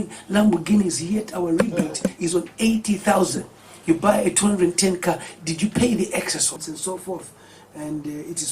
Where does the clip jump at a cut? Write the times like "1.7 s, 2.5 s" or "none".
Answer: 6.7 s